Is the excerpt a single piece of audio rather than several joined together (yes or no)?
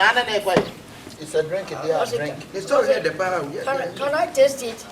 no